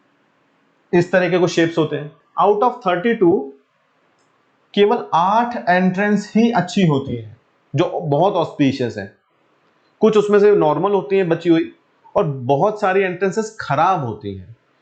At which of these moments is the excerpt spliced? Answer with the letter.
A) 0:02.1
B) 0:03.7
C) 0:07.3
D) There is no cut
A